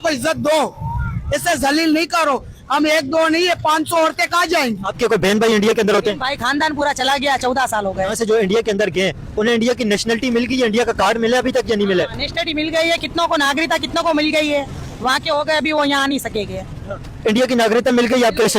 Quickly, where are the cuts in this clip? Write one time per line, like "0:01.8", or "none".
0:04.9
0:08.1

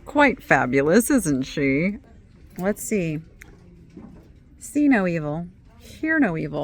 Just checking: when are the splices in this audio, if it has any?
0:02.0

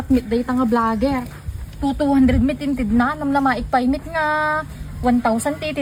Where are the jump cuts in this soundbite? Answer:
none

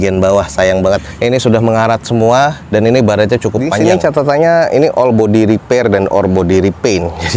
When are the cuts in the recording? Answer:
0:03.8

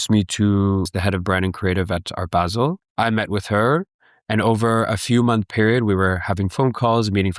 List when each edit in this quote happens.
0:00.9
0:02.8

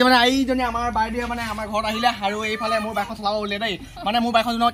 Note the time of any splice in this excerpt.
none

